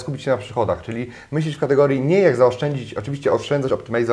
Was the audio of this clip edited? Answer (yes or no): no